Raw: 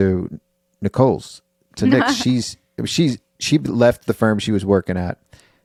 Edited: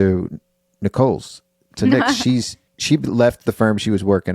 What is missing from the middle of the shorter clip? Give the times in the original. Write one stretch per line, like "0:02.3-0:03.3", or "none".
0:02.7-0:03.3